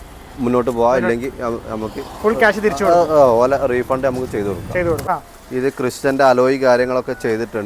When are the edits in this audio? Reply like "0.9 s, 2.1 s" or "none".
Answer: 5.0 s